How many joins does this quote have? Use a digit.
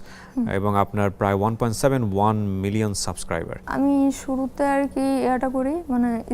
1